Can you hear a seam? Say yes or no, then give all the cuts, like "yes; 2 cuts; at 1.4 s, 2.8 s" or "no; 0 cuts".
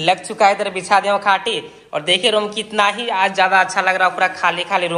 no; 0 cuts